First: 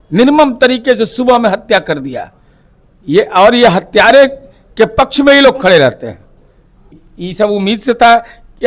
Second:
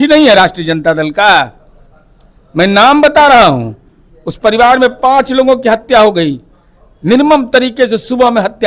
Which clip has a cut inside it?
first; 1 cut; at 7.0 s

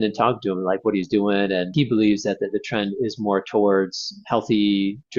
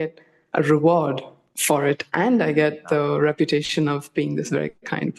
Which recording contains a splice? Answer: first; 1 cut; at 1.7 s

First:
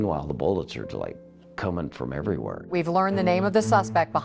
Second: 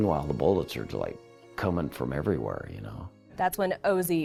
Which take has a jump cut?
first; 1 cut; at 2.7 s

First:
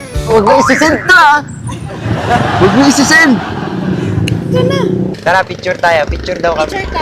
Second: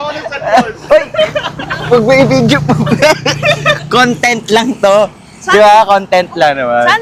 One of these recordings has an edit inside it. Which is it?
first; 1 cut; at 5.2 s

